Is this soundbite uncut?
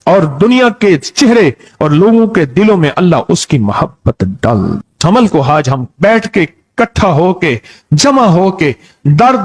no; 1 cut; at 4.8 s

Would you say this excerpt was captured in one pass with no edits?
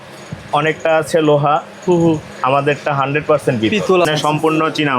no; 1 cut; at 4.0 s

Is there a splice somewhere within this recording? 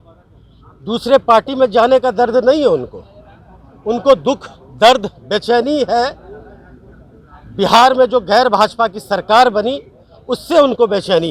no; 0 cuts

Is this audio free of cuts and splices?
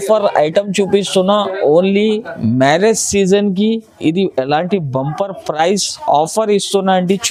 yes; 0 cuts

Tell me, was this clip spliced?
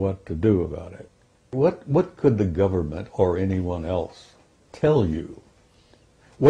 yes; 1 cut; at 1.5 s

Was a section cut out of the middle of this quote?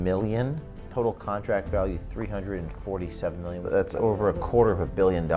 yes; 2 cuts; at 0.8 s, 3.6 s

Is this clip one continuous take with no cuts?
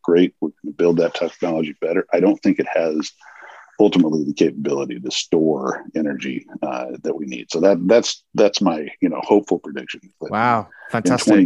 yes; 0 cuts

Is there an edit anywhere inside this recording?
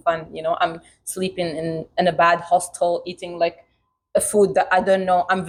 no; 0 cuts

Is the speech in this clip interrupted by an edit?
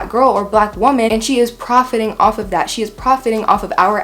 no; 0 cuts

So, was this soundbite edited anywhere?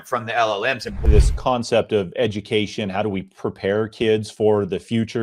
yes; 1 cut; at 1.0 s

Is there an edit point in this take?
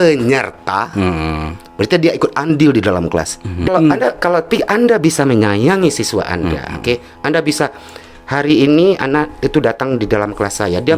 yes; 1 cut; at 3.7 s

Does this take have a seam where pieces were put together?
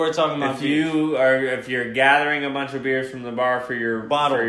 no; 0 cuts

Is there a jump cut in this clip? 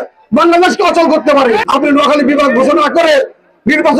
yes; 1 cut; at 1.6 s

